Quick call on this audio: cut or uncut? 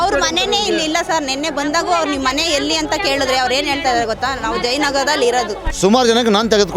cut